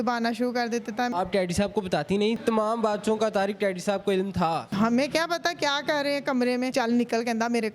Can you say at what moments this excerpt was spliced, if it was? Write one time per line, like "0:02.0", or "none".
0:01.1
0:02.4
0:04.7
0:06.7